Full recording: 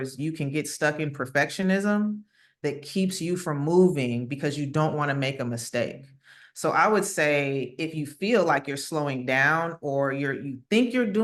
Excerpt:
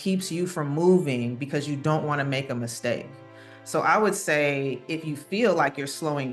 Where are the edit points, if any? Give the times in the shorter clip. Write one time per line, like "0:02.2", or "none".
none